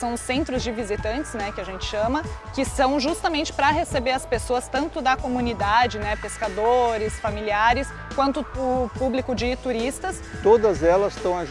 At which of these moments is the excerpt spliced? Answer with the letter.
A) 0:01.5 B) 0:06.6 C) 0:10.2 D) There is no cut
C